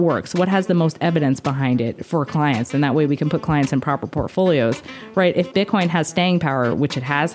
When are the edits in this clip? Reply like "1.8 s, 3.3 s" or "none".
none